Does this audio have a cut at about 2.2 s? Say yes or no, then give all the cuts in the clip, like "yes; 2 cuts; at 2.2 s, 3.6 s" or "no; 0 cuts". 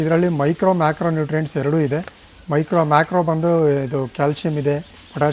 no; 0 cuts